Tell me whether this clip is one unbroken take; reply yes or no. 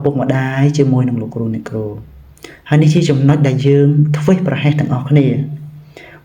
yes